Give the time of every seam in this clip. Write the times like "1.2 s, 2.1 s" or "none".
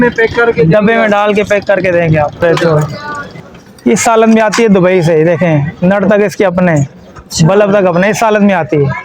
2.4 s